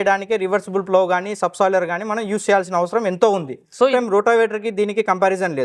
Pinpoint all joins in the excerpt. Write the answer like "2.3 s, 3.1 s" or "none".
3.9 s